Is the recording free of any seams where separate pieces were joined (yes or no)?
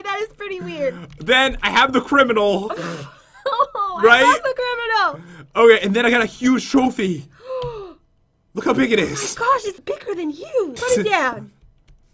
no